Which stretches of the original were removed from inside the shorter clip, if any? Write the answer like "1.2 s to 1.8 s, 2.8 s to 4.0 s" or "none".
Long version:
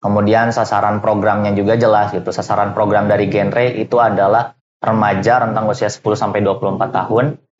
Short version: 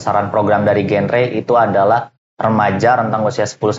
none